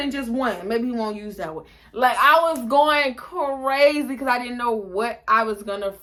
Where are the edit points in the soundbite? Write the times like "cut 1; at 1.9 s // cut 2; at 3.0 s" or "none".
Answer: none

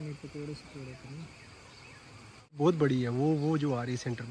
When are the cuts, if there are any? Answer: cut 1; at 2.6 s

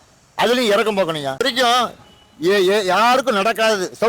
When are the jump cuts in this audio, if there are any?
cut 1; at 1.4 s

